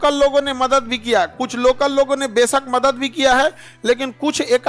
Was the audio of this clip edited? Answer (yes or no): no